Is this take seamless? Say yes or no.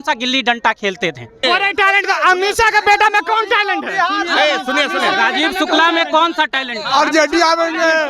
no